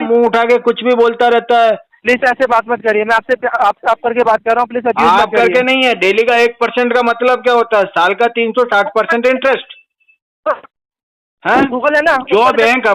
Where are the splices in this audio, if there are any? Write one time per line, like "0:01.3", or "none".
0:01.9